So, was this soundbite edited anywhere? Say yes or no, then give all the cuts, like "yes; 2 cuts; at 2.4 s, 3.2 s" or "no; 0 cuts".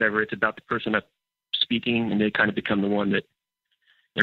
no; 0 cuts